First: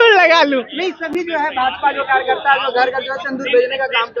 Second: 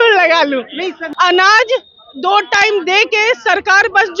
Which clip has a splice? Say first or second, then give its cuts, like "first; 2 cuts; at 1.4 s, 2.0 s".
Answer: second; 1 cut; at 1.0 s